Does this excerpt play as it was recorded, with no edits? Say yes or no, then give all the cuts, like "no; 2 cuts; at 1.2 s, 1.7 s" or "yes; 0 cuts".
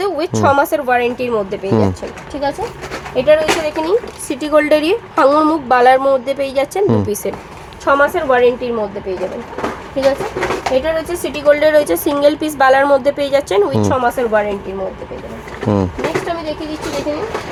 yes; 0 cuts